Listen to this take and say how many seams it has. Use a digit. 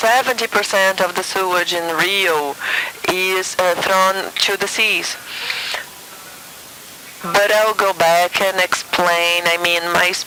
0